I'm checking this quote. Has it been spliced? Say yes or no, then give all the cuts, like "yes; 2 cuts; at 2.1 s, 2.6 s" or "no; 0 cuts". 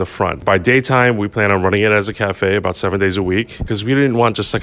yes; 1 cut; at 3.7 s